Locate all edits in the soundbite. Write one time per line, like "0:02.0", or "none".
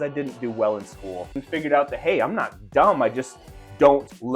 0:01.4